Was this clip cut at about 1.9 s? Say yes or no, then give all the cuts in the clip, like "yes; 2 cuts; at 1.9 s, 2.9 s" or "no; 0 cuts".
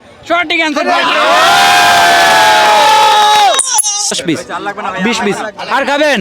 no; 1 cut; at 4.2 s